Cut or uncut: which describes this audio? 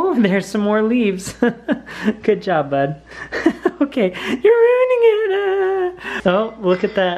cut